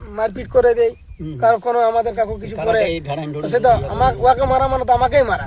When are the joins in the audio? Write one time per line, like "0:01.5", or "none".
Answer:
0:02.2